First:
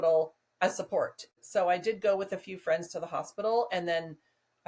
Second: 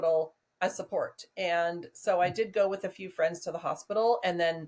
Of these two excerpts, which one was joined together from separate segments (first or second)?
first